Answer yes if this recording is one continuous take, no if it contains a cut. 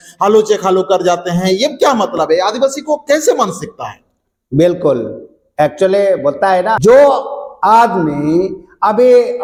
yes